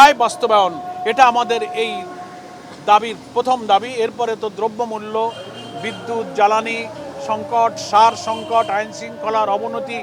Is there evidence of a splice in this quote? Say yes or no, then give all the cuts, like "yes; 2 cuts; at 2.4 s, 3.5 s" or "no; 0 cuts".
no; 0 cuts